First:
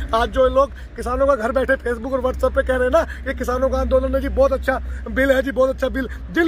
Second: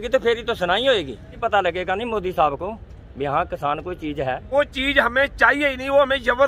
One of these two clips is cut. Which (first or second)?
second